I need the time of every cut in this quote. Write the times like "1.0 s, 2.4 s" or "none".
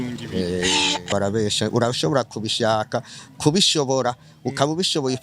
1.1 s